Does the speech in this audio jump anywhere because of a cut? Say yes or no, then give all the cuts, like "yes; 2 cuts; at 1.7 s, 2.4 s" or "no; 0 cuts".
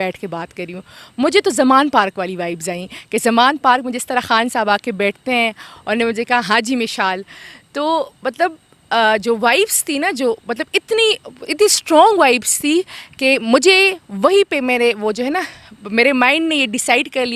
no; 0 cuts